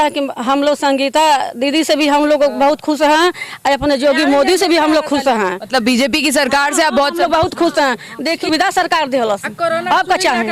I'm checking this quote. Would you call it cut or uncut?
cut